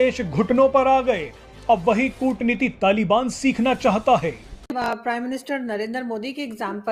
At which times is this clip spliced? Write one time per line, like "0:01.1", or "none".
0:05.0